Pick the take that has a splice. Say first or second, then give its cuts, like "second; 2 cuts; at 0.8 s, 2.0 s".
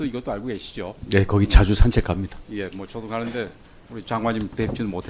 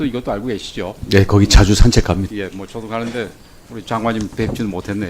second; 1 cut; at 2.3 s